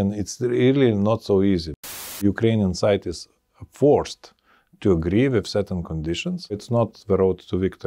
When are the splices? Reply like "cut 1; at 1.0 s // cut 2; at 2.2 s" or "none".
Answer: cut 1; at 1.8 s